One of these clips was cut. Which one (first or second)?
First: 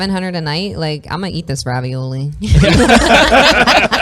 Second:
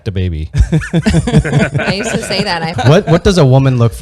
second